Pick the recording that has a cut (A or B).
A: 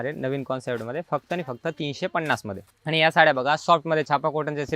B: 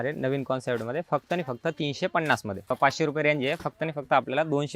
B